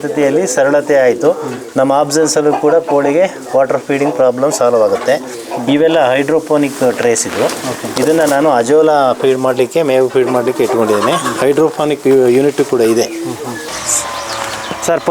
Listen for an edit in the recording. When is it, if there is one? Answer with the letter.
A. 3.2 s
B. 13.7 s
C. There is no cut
B